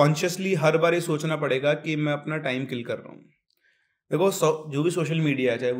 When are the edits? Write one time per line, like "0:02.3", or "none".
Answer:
none